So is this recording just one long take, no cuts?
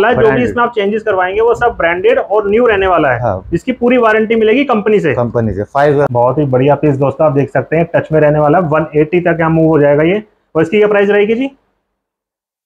no; 1 cut; at 6.1 s

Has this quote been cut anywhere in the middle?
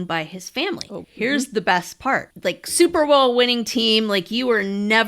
yes; 2 cuts; at 1.0 s, 2.3 s

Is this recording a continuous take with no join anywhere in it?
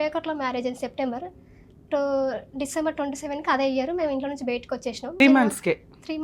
no; 1 cut; at 5.2 s

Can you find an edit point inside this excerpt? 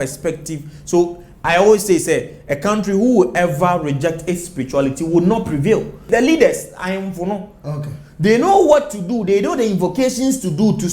yes; 1 cut; at 6.0 s

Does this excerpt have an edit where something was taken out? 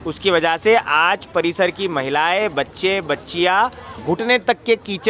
yes; 1 cut; at 4.0 s

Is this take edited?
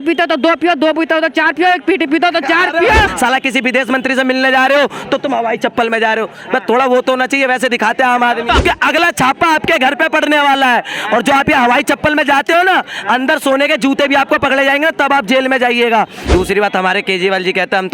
yes; 3 cuts; at 3.1 s, 8.6 s, 16.2 s

